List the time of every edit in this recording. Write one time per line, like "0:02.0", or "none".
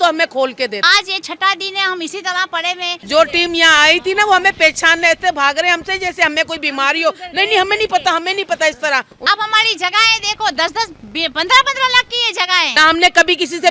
0:00.8
0:03.0
0:09.2
0:12.7